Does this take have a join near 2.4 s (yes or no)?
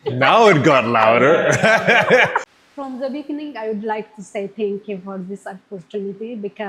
yes